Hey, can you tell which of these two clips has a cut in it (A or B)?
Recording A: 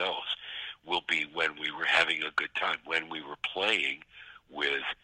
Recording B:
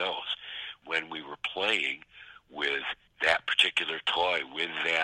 B